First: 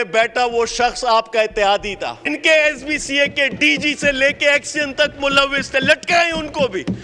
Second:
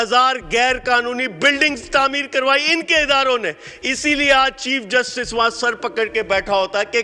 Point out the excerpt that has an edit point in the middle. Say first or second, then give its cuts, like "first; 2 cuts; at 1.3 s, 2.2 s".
first; 1 cut; at 2.3 s